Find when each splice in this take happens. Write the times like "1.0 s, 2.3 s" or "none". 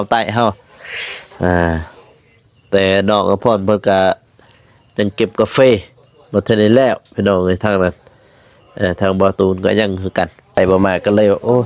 10.6 s